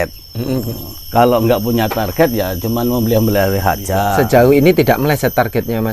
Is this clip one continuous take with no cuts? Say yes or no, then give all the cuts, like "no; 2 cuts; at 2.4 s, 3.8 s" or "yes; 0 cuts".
no; 1 cut; at 4.1 s